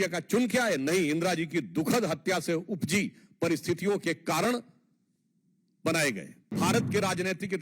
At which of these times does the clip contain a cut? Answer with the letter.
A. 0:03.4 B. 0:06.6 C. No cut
B